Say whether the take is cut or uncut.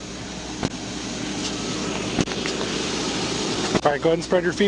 uncut